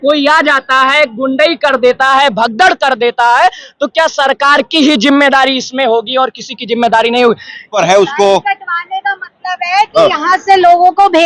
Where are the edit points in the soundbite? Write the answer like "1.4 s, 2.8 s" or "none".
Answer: 7.7 s